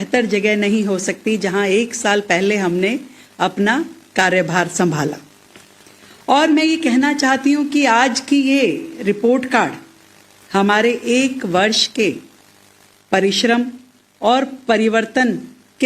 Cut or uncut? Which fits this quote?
cut